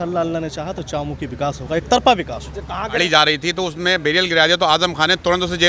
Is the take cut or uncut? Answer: cut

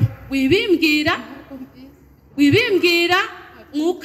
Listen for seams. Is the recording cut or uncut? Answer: uncut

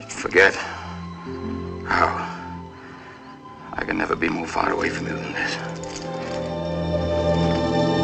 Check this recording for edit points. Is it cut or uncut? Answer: uncut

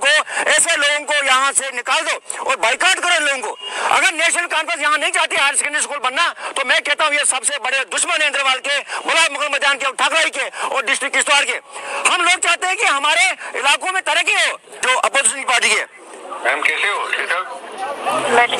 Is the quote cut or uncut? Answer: cut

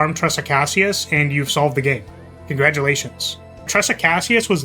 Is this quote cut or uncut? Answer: cut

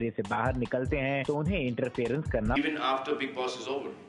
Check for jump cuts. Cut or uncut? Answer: uncut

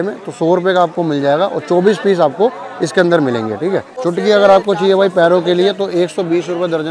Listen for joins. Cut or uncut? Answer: cut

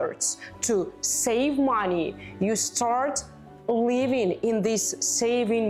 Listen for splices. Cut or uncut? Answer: uncut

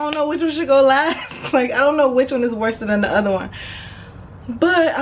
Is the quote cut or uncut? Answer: uncut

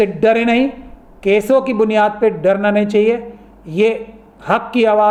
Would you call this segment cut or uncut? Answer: uncut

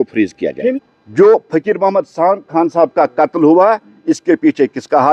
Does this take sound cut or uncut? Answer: cut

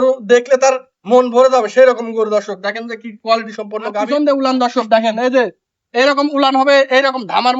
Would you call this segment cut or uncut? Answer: cut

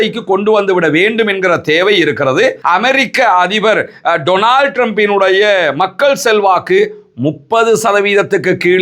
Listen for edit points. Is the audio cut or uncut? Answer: cut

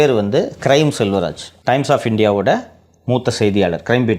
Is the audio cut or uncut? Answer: cut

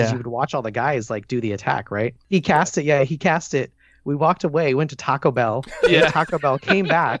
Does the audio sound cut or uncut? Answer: cut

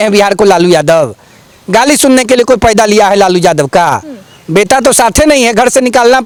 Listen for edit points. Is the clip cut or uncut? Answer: uncut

